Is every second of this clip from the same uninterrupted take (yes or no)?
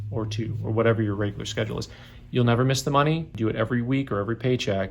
no